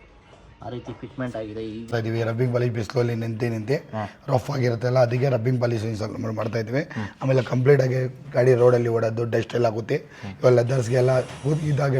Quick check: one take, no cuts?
no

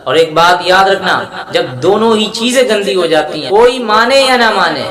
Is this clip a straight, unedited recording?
no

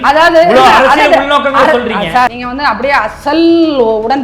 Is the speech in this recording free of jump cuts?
no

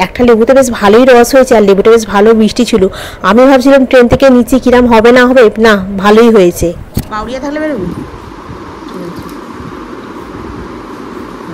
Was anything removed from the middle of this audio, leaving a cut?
no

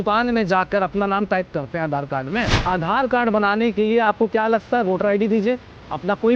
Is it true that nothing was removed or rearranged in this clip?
no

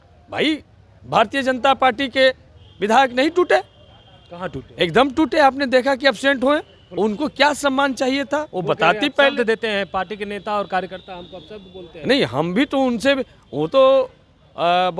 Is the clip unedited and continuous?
no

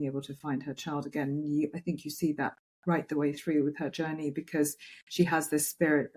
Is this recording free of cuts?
yes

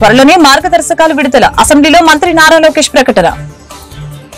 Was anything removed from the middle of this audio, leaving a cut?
no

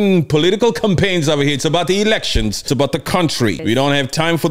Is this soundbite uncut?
no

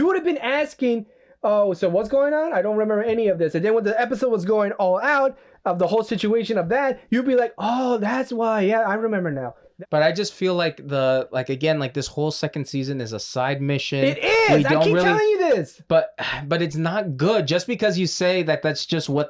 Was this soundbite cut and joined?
yes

